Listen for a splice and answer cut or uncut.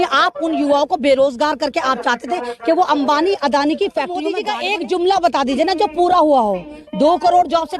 cut